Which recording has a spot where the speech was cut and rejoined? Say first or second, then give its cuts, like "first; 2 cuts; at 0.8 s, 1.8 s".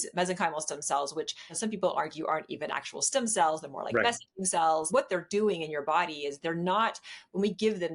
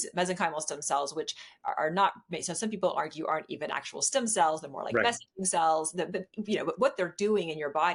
first; 2 cuts; at 1.4 s, 4.9 s